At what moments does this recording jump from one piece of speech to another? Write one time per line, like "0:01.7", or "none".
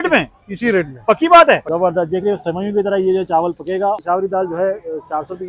0:01.6
0:04.0